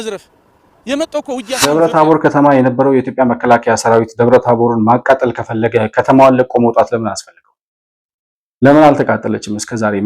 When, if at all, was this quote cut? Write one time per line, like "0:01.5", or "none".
0:01.6